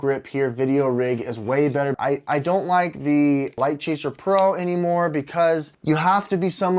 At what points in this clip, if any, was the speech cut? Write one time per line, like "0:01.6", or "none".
0:02.0
0:03.6
0:05.7